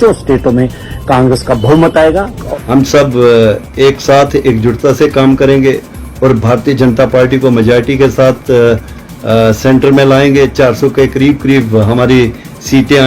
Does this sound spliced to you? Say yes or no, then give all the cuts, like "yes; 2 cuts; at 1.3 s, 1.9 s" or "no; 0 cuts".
yes; 1 cut; at 2.4 s